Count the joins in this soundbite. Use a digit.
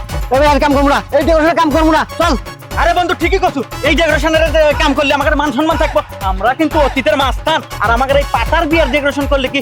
0